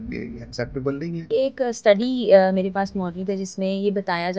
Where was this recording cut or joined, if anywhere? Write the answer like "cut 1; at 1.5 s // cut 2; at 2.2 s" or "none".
cut 1; at 1.3 s